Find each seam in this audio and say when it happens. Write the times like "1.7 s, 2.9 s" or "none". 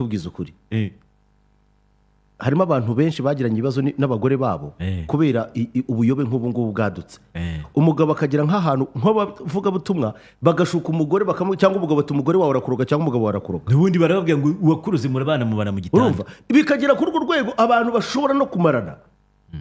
none